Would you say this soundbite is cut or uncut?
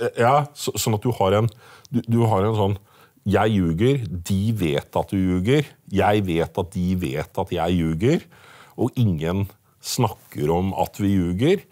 uncut